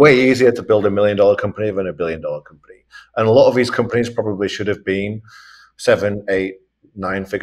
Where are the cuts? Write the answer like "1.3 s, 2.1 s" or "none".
none

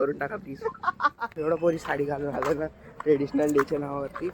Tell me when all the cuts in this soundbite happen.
1.3 s

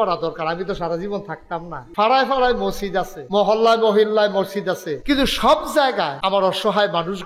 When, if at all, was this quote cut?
1.8 s, 3.2 s, 4.9 s, 6.2 s

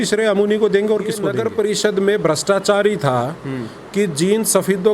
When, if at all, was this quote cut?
1.3 s

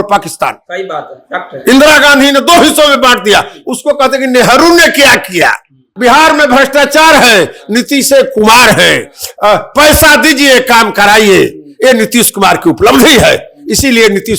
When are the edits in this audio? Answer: 5.9 s

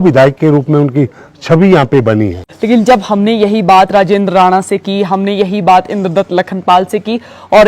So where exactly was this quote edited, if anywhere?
2.5 s

